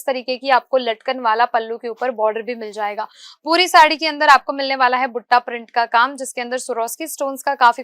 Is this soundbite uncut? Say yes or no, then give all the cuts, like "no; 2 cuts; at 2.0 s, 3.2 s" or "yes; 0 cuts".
yes; 0 cuts